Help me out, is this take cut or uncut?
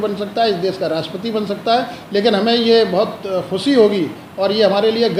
uncut